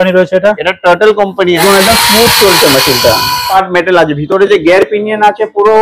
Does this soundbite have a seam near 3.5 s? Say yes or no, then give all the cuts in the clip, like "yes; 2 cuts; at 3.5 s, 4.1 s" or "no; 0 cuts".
yes; 2 cuts; at 1.6 s, 3.5 s